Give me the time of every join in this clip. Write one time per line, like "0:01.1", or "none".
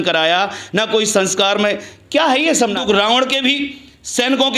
0:02.8